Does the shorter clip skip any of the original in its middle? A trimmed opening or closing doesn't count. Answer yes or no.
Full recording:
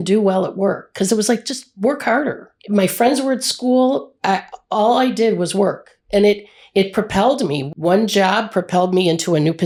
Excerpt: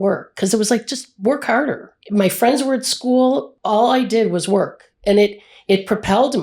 yes